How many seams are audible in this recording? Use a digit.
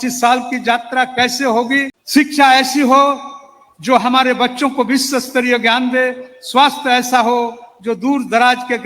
1